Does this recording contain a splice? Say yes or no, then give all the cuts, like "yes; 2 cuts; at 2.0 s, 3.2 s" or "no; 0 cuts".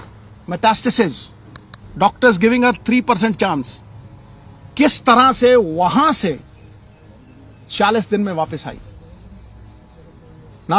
no; 0 cuts